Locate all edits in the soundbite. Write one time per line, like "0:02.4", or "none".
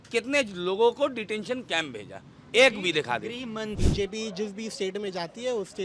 0:03.8